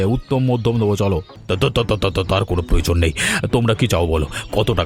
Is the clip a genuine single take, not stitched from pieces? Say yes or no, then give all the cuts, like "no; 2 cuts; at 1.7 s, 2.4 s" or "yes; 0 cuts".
no; 1 cut; at 1.3 s